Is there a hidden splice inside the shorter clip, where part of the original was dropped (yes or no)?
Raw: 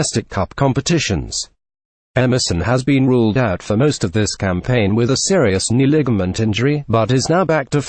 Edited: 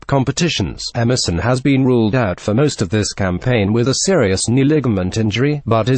yes